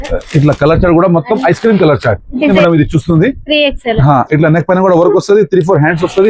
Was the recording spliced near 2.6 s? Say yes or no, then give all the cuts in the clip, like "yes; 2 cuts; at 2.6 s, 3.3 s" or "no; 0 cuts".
yes; 1 cut; at 2.6 s